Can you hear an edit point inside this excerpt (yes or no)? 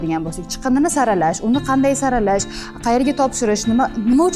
no